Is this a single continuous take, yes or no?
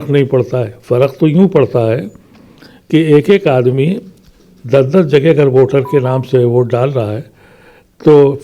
yes